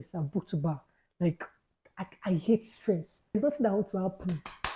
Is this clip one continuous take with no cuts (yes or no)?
no